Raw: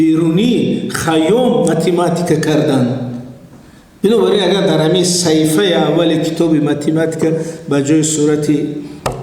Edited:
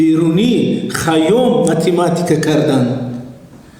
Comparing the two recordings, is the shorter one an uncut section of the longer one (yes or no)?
yes